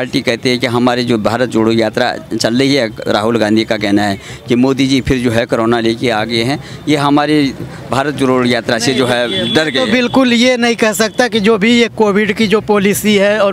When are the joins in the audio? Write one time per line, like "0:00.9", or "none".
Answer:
none